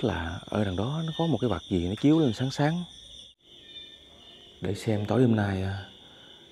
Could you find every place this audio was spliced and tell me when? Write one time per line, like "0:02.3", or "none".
0:03.4